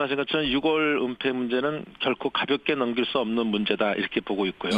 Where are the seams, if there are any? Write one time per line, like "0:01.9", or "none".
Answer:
0:01.5